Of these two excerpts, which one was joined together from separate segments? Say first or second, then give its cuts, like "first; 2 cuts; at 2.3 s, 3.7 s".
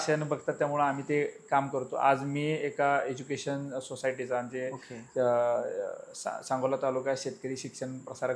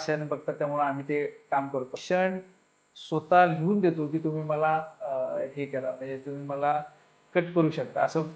second; 1 cut; at 2.0 s